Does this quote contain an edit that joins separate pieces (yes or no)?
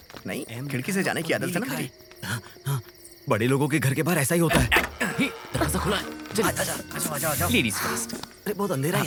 no